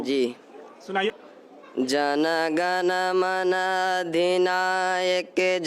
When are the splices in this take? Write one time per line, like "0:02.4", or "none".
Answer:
0:01.1